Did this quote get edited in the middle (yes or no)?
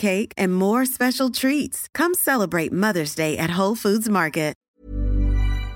yes